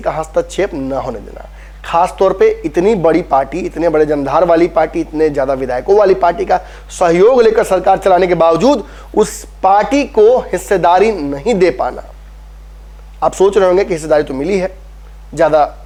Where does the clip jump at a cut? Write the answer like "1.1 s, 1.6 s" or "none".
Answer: none